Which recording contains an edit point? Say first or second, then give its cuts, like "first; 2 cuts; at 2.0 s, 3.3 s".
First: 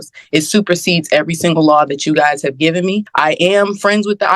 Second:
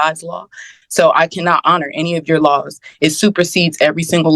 first; 1 cut; at 3.1 s